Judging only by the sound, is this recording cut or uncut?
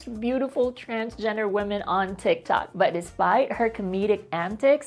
cut